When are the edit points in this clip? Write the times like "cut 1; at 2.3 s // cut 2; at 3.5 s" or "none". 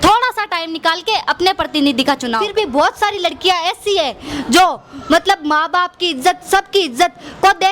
cut 1; at 2.4 s